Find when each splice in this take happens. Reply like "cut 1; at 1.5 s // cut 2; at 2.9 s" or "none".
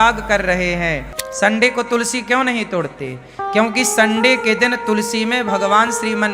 cut 1; at 1.1 s